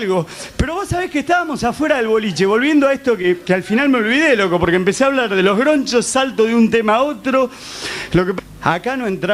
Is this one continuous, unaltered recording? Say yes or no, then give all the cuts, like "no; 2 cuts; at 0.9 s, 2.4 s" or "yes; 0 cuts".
yes; 0 cuts